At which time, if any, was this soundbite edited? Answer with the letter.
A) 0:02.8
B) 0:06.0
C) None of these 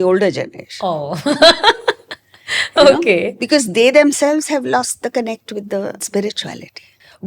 B